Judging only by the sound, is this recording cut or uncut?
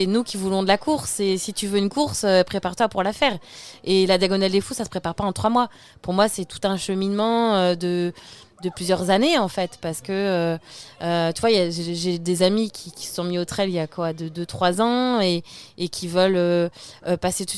uncut